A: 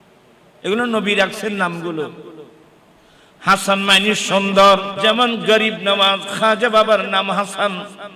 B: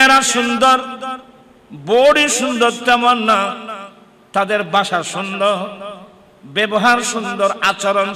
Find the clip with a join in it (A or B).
A